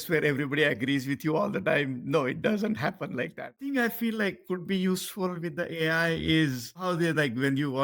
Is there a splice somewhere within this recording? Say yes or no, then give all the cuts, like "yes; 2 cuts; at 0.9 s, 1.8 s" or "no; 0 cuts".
yes; 2 cuts; at 3.5 s, 6.8 s